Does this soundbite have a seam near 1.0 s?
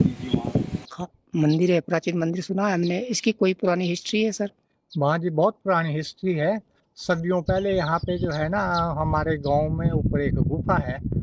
yes; 1 cut; at 1.0 s

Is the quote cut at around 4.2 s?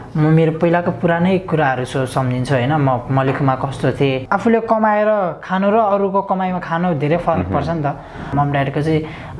yes; 2 cuts; at 4.2 s, 8.3 s

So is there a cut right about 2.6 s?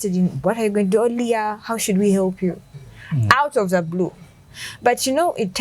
no; 0 cuts

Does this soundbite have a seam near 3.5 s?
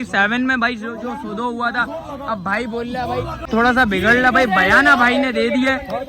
yes; 1 cut; at 3.5 s

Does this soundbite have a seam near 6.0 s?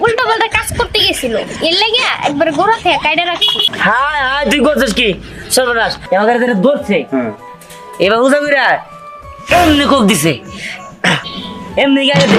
yes; 1 cut; at 6.0 s

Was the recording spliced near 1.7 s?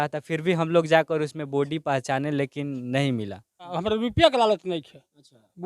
no; 1 cut; at 3.7 s

